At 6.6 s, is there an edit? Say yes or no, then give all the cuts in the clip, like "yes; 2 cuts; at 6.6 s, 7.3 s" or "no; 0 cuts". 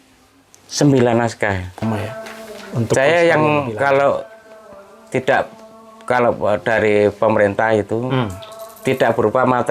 no; 1 cut; at 1.9 s